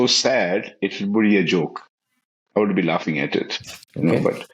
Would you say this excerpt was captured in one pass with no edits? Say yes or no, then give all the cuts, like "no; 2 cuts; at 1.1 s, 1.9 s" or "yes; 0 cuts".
yes; 0 cuts